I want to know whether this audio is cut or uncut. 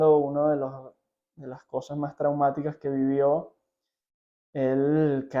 uncut